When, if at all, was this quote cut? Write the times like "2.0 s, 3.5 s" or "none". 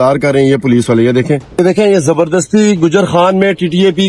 1.5 s